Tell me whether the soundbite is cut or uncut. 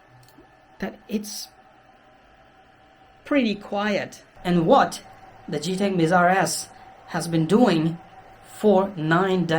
cut